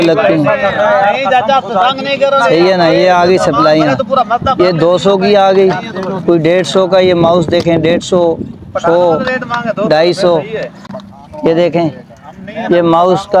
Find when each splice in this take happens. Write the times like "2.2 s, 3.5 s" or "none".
none